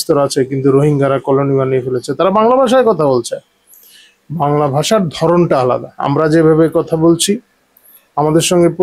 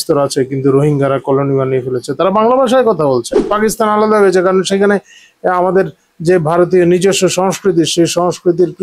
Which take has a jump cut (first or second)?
second